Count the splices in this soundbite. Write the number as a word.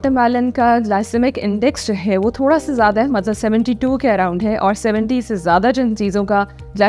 zero